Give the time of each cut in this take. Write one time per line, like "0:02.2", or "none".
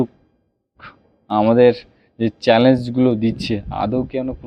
none